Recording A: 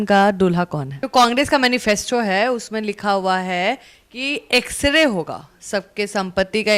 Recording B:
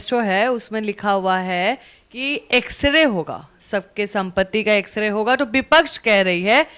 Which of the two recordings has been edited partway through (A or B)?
A